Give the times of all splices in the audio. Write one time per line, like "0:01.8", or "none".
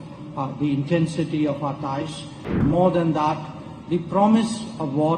0:02.6